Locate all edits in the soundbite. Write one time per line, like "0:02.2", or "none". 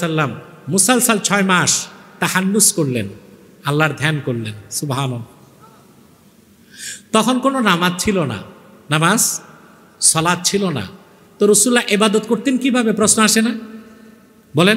none